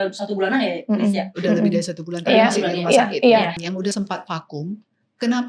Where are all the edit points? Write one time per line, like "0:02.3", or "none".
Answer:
0:03.6

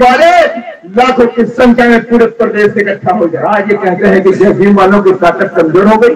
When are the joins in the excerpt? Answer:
0:03.4

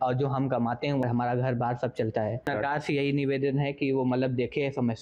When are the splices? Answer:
0:01.0
0:02.4

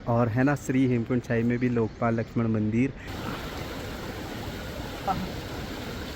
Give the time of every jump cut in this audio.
0:03.1
0:05.1

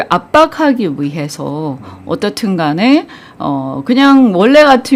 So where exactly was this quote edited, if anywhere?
none

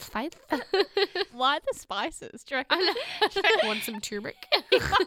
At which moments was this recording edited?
0:01.4
0:03.6

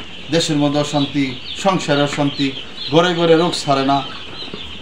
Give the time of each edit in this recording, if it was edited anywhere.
none

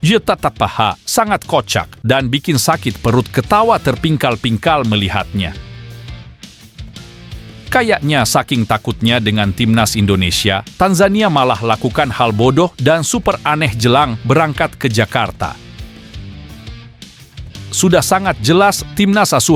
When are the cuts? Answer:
none

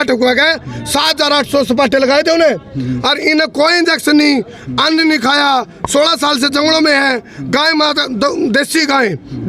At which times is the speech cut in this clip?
none

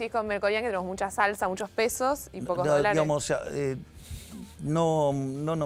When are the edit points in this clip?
none

